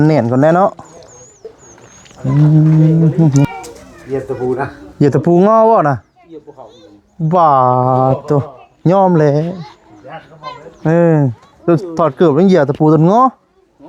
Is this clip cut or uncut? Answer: cut